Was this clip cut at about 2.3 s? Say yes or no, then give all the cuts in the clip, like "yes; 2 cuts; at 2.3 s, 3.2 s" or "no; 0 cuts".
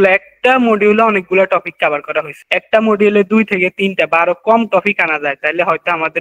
yes; 1 cut; at 2.3 s